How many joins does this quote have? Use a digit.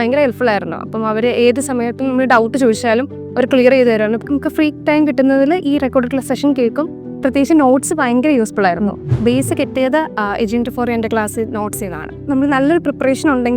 3